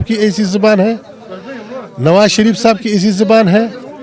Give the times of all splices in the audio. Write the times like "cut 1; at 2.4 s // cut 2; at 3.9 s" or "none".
none